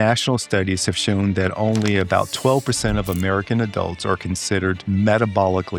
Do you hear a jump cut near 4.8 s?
yes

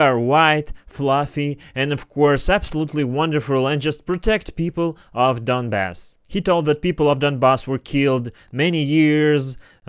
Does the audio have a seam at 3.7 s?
no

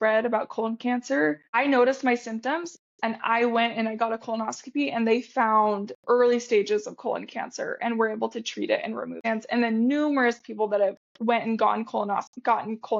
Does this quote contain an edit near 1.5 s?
yes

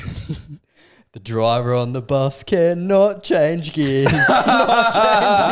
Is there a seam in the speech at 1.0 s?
no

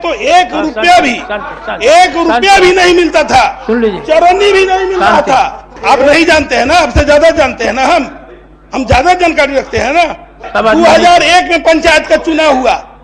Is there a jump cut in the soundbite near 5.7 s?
yes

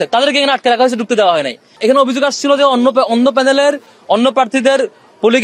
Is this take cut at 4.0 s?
no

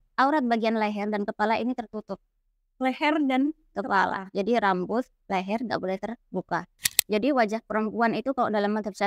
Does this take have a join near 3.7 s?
no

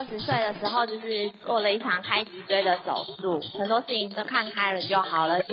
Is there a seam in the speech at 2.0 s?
no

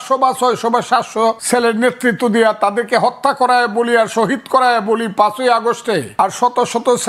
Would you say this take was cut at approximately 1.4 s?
yes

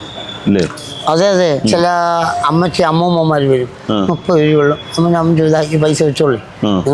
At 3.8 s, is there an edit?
no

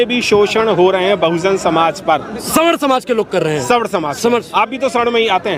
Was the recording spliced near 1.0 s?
no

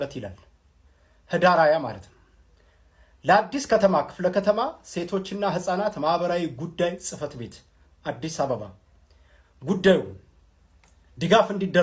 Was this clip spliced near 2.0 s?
no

